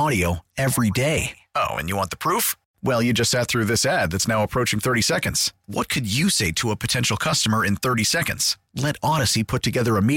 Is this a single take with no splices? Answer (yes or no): yes